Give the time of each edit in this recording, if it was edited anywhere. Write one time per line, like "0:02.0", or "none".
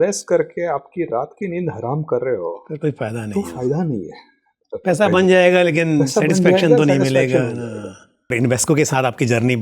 0:08.3